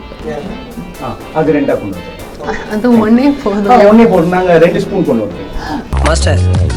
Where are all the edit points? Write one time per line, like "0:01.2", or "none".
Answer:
none